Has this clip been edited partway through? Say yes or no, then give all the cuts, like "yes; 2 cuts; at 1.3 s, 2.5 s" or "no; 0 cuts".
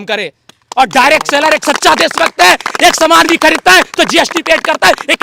no; 0 cuts